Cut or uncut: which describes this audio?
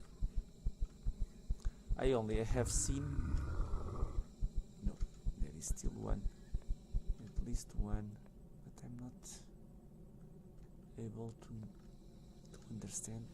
cut